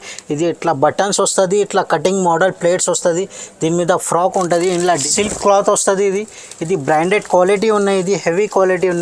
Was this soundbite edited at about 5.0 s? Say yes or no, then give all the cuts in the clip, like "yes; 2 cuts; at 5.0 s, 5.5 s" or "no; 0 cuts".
yes; 1 cut; at 5.0 s